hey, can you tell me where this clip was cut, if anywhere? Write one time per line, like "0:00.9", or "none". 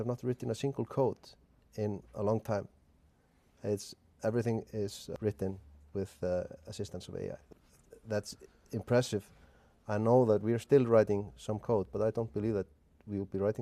0:01.5
0:05.1
0:07.4